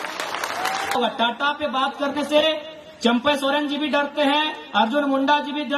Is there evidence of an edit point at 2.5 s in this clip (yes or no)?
no